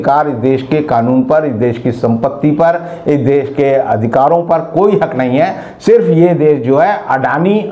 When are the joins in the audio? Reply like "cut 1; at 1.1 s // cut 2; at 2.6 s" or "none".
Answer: none

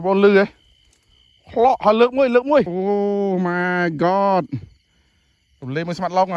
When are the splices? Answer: cut 1; at 2.7 s

